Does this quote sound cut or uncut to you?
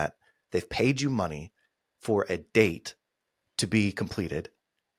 uncut